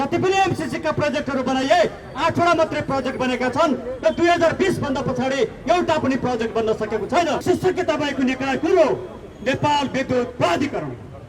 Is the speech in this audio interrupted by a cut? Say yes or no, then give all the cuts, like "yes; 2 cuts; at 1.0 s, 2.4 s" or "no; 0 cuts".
yes; 1 cut; at 7.4 s